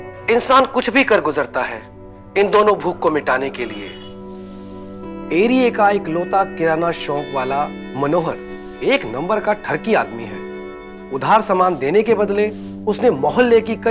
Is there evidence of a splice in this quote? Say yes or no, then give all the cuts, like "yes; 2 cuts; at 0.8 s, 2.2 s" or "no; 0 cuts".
no; 0 cuts